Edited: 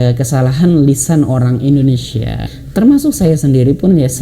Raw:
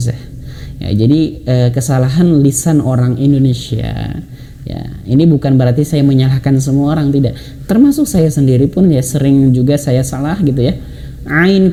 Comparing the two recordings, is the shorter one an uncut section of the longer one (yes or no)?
no